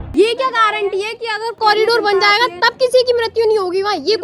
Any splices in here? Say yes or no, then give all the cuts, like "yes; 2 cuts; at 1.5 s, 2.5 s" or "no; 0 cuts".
yes; 1 cut; at 1.6 s